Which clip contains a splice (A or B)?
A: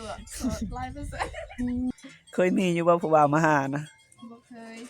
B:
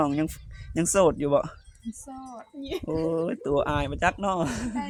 A